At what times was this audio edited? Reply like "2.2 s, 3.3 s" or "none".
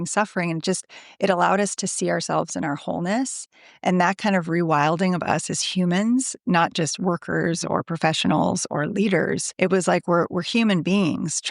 9.5 s